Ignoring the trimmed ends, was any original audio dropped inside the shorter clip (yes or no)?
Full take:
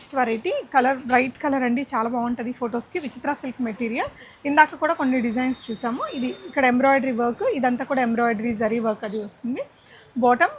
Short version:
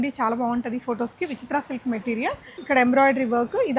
yes